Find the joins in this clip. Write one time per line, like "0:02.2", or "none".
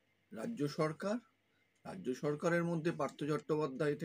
none